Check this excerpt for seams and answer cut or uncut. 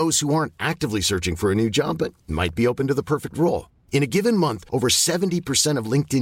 uncut